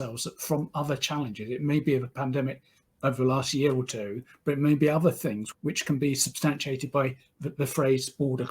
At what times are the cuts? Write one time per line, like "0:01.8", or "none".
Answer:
0:05.5